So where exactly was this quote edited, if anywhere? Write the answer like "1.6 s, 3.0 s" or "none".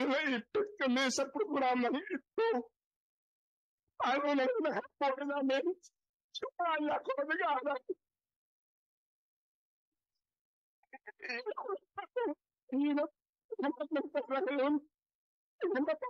none